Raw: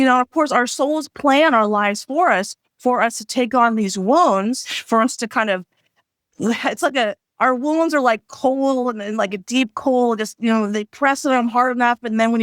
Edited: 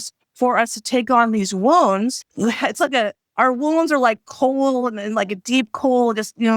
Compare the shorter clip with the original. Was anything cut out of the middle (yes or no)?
yes